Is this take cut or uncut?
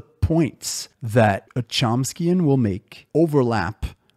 uncut